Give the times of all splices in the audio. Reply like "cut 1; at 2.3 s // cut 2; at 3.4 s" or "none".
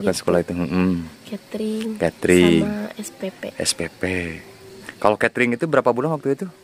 cut 1; at 4.9 s